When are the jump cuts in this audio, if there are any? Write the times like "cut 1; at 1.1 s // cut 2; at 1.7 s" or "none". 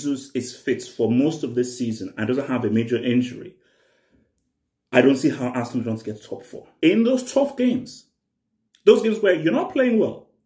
cut 1; at 6.6 s